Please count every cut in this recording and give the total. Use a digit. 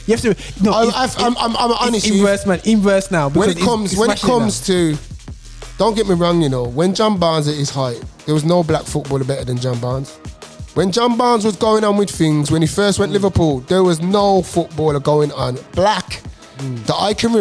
0